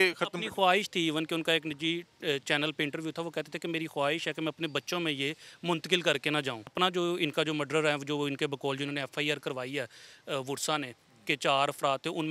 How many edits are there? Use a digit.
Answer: 1